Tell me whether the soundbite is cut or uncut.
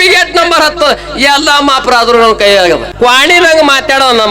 cut